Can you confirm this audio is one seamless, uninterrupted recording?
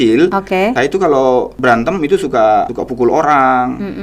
no; 3 cuts; at 0.8 s, 1.5 s, 2.8 s

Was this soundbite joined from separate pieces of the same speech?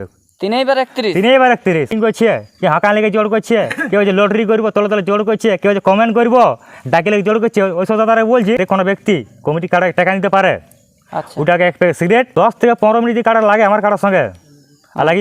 yes; 3 cuts; at 1.9 s, 8.6 s, 12.3 s

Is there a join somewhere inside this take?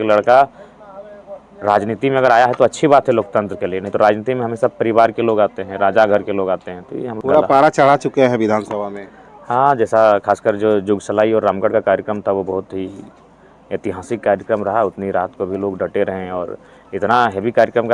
yes; 1 cut; at 7.1 s

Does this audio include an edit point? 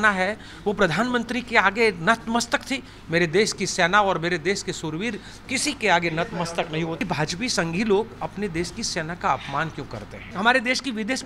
yes; 2 cuts; at 7.0 s, 10.2 s

